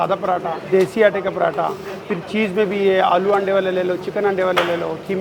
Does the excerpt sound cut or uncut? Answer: uncut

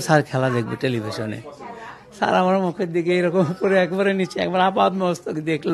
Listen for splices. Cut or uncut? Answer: uncut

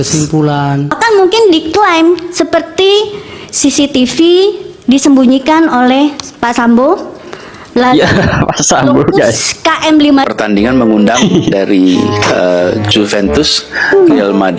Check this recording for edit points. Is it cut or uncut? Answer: cut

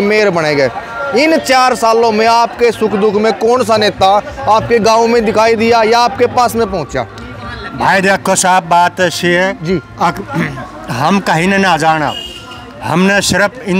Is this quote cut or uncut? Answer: uncut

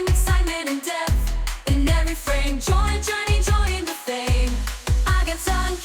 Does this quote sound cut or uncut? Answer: uncut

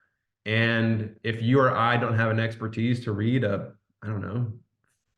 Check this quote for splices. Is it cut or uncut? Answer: uncut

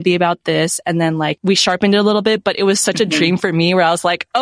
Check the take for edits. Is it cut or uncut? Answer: cut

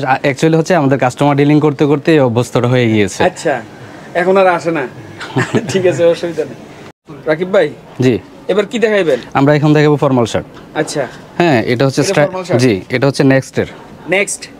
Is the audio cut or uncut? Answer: uncut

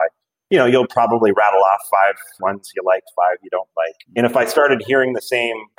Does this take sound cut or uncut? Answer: uncut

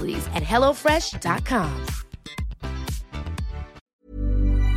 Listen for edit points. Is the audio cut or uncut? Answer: cut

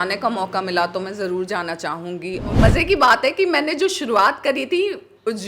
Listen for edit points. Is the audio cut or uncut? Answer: cut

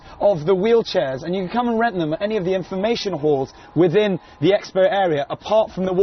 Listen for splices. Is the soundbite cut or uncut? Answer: cut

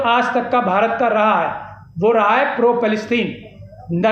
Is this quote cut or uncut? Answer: uncut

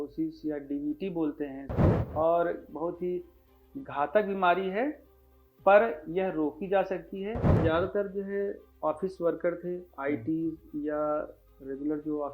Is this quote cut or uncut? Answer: cut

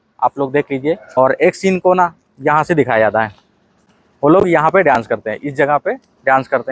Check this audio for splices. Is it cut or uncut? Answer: cut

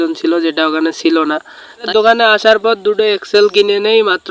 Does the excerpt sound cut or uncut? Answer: cut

